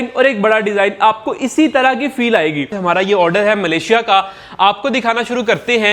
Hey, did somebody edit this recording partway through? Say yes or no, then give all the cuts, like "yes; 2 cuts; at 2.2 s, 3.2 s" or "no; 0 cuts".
yes; 1 cut; at 2.8 s